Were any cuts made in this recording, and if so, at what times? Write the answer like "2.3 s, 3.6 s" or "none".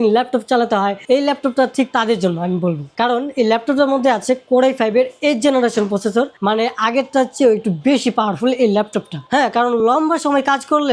none